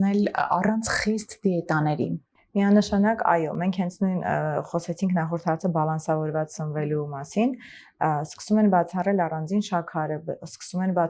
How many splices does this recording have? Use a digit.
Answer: 0